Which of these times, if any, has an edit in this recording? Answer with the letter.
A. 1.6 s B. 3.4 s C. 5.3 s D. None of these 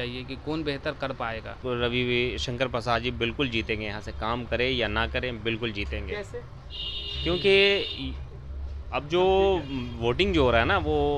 A